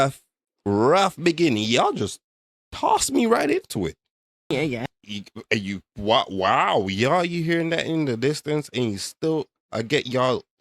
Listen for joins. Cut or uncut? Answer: cut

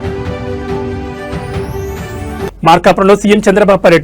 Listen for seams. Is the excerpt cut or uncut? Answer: uncut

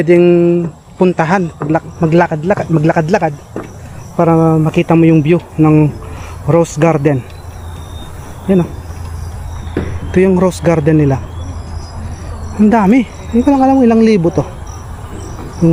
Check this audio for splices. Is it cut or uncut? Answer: uncut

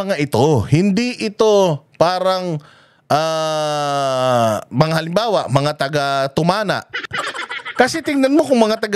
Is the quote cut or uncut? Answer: uncut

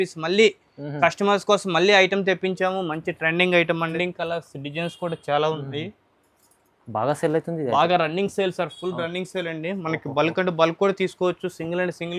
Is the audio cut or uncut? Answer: cut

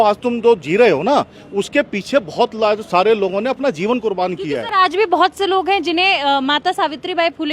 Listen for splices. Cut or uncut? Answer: uncut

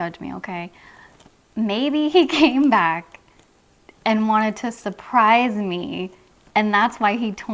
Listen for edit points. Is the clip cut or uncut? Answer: uncut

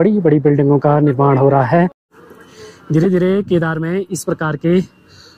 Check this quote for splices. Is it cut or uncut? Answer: cut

